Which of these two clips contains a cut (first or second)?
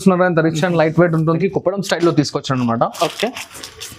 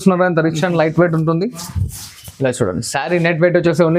first